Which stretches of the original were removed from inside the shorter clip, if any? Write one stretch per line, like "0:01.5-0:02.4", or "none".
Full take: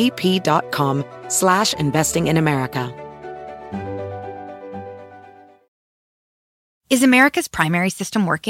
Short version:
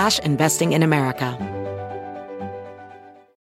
0:02.9-0:03.7